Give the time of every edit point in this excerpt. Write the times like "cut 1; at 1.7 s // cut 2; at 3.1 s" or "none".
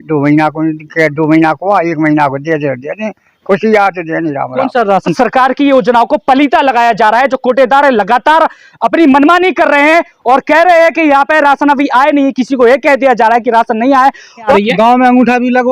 cut 1; at 5.1 s // cut 2; at 14.5 s